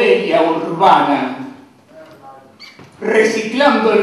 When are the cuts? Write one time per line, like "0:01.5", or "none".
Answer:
0:00.9